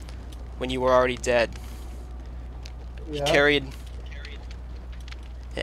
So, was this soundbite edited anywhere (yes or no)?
no